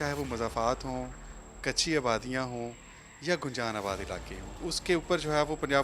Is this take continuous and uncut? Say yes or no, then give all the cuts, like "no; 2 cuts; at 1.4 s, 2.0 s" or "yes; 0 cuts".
no; 1 cut; at 4.6 s